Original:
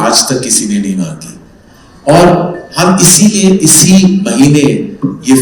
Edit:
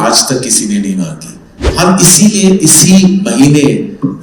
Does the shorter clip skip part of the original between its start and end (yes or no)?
yes